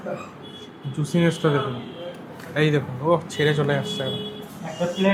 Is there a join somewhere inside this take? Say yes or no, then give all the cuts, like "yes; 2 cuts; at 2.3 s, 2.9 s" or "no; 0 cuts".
no; 0 cuts